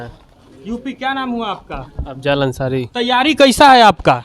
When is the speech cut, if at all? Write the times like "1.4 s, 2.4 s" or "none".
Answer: 2.9 s